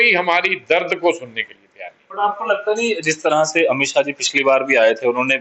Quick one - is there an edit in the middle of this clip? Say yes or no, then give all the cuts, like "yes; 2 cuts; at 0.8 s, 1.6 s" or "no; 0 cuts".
no; 0 cuts